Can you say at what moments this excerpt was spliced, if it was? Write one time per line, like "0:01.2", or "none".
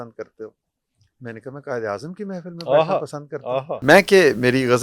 0:03.8